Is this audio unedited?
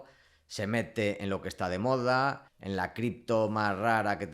no; 1 cut; at 2.5 s

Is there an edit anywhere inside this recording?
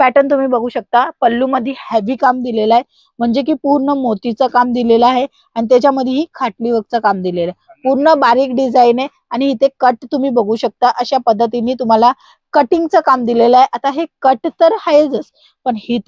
no; 0 cuts

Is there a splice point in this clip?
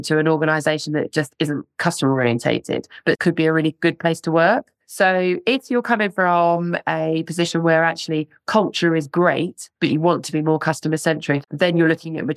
yes; 2 cuts; at 3.2 s, 11.5 s

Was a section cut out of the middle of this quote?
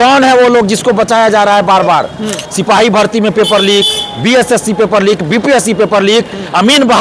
no; 0 cuts

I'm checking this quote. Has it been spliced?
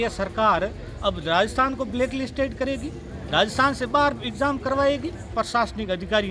yes; 1 cut; at 5.3 s

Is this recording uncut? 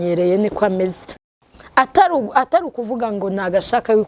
no; 1 cut; at 1.1 s

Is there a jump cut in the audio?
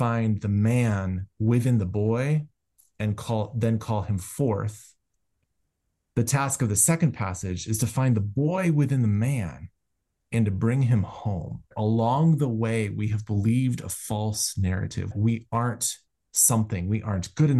yes; 2 cuts; at 11.7 s, 15.1 s

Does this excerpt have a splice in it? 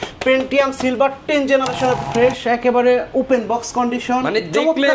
yes; 1 cut; at 2.0 s

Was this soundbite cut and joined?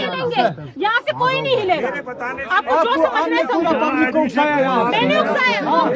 no; 0 cuts

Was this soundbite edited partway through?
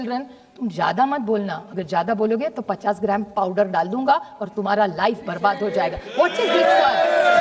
no; 0 cuts

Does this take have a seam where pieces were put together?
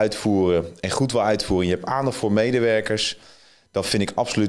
no; 0 cuts

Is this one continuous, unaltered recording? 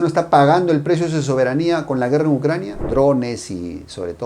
no; 1 cut; at 2.7 s

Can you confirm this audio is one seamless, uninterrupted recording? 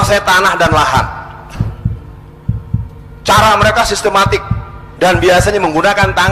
no; 2 cuts; at 1.2 s, 3.2 s

